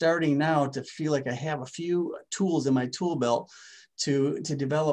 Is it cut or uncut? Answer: uncut